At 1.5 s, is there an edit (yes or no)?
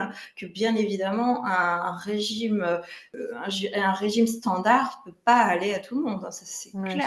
no